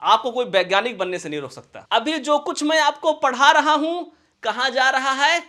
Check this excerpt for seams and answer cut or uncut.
cut